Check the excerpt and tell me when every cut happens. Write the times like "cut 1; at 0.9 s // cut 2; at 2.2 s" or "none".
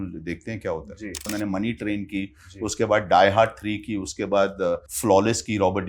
cut 1; at 1.3 s // cut 2; at 4.9 s